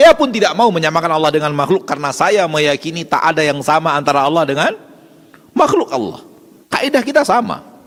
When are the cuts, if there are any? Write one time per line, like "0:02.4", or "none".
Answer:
none